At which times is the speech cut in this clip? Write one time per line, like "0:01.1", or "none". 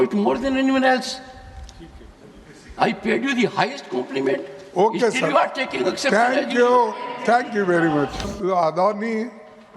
0:08.3